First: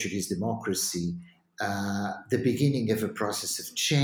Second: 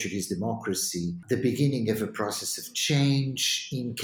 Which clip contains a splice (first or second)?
second